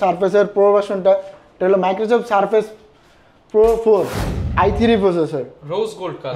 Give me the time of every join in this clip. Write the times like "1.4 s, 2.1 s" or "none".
4.4 s